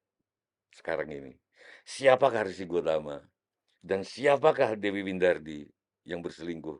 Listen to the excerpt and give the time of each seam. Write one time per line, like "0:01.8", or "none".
none